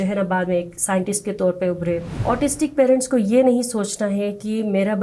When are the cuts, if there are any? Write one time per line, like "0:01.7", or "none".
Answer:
0:02.1